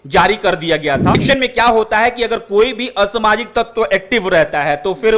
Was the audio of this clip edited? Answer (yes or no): yes